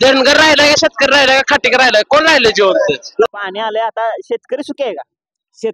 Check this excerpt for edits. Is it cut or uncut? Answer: cut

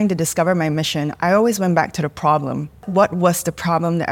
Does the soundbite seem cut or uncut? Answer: cut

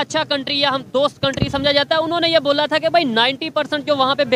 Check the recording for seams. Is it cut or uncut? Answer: uncut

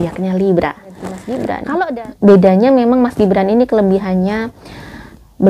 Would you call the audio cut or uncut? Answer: cut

